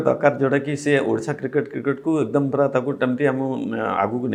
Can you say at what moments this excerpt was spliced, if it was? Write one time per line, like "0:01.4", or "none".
none

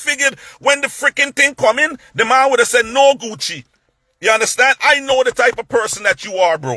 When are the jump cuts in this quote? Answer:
none

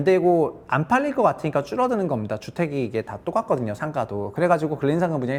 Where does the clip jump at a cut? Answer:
none

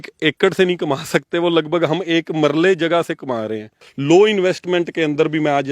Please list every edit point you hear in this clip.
0:03.9

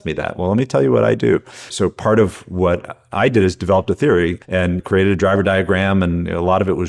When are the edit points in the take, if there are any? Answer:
0:01.7
0:04.6

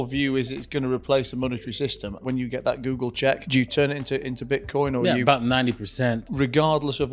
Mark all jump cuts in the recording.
0:02.2

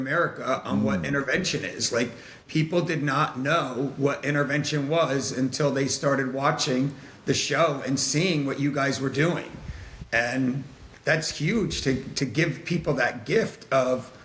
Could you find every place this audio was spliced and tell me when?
none

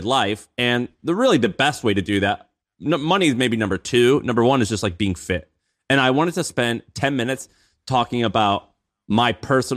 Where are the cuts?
none

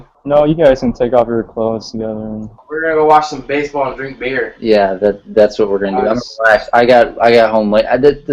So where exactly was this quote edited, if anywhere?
0:02.6

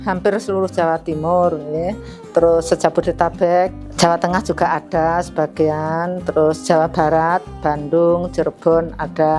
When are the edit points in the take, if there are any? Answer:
none

